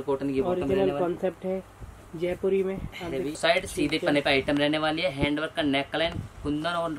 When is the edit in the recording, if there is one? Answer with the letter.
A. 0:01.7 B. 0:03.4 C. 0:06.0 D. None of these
B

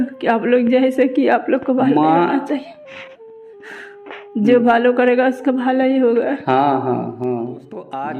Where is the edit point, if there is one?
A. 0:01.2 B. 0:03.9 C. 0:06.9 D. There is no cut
D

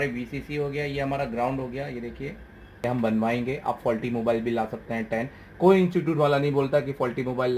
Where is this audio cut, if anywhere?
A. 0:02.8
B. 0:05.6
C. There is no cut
A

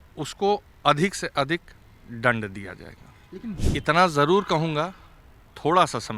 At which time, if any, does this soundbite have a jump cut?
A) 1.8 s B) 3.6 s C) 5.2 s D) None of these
B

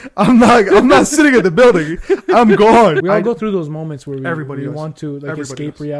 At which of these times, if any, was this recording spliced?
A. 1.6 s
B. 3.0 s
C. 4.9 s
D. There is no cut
B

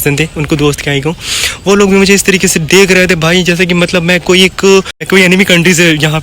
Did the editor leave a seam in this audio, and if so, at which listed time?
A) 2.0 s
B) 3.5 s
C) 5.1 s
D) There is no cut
C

